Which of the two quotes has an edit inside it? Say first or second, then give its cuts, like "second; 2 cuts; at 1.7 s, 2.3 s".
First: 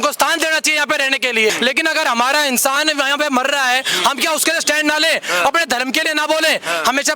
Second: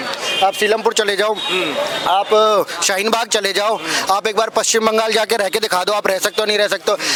first; 1 cut; at 1.5 s